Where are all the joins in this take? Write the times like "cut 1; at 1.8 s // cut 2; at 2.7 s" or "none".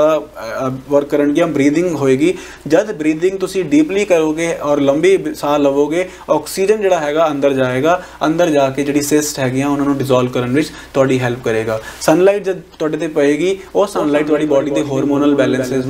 none